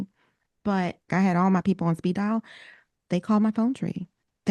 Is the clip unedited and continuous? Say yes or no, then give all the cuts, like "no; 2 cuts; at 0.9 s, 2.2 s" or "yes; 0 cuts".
no; 1 cut; at 1.1 s